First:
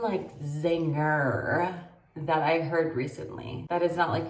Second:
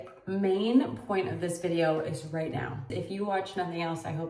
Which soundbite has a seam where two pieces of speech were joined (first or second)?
second